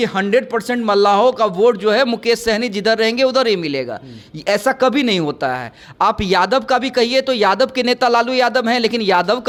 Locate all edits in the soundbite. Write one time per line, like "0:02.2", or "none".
none